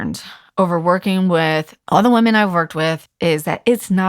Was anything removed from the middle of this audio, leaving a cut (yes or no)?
yes